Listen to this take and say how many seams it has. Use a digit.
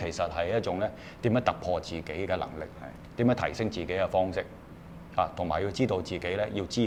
0